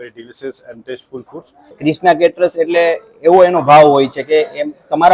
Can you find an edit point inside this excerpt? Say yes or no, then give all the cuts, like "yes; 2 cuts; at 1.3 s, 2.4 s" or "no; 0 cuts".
yes; 1 cut; at 1.8 s